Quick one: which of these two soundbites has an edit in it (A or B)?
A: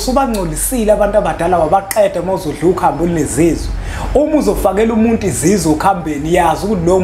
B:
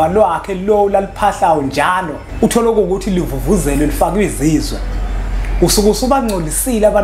B